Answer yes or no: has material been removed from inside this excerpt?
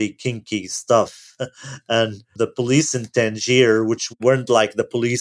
yes